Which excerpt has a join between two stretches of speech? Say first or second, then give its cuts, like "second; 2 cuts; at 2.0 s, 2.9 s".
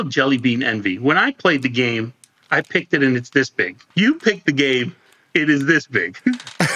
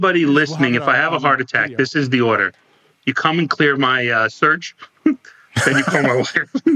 first; 1 cut; at 3.8 s